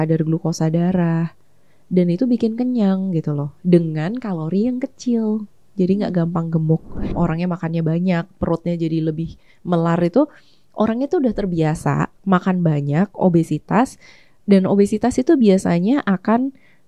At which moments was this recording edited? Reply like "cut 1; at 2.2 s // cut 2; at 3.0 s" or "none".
cut 1; at 7.0 s